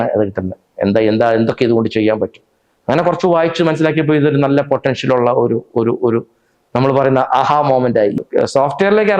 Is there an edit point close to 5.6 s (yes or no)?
no